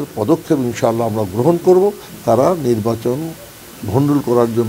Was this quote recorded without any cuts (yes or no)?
no